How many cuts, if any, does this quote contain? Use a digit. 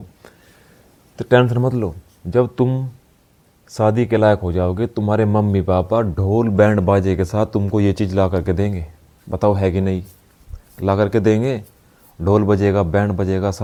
0